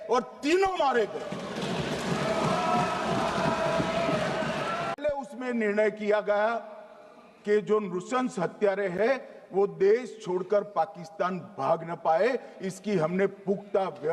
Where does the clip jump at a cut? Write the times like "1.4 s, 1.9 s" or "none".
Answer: 5.0 s

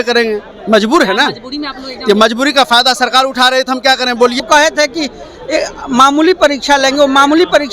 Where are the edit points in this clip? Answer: 4.4 s

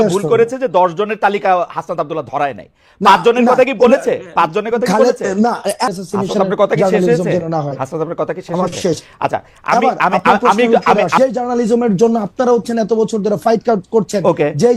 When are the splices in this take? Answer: 5.9 s, 11.2 s

